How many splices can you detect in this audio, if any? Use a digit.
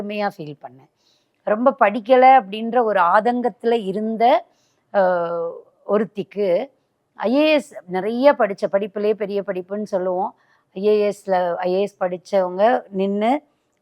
1